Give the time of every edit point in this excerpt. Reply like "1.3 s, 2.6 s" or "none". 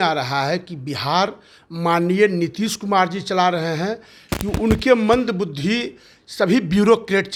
none

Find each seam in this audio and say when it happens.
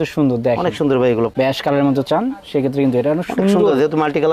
1.3 s

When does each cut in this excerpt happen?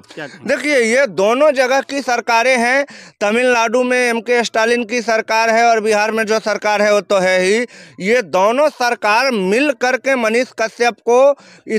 none

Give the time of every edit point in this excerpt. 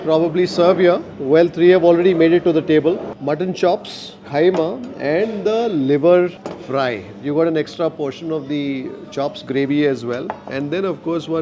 none

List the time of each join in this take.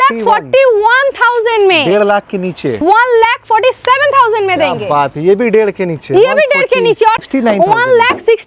2.8 s, 7.2 s

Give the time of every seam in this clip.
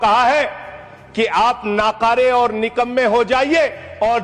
none

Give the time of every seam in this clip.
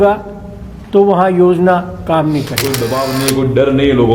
2.6 s

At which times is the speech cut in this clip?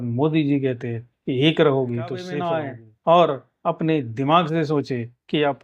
2.3 s

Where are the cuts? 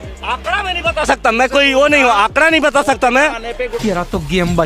3.8 s

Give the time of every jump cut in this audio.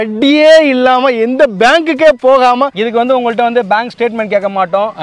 2.7 s

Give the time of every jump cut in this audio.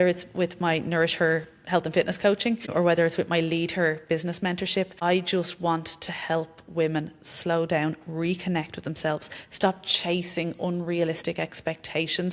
2.7 s, 4.9 s

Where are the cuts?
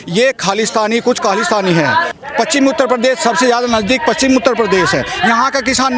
2.1 s

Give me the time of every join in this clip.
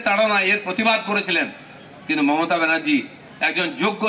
none

